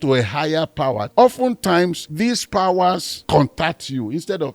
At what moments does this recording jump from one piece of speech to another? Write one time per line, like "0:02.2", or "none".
0:01.1
0:02.0
0:03.1